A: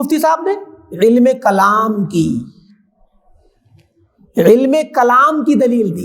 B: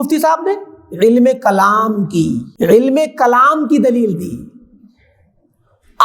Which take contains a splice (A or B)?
B